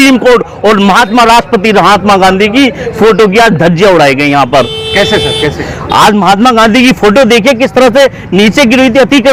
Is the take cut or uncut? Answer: uncut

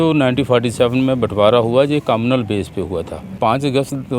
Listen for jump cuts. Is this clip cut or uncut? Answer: cut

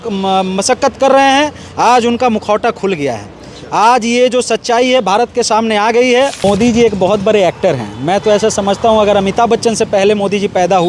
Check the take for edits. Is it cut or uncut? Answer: cut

